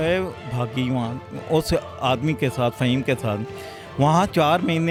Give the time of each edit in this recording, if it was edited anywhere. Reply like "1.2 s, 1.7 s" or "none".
none